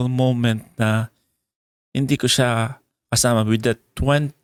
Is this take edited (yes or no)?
no